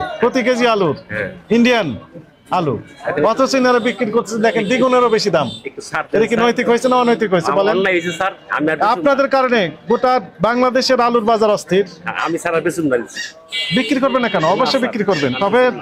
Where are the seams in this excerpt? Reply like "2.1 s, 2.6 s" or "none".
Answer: none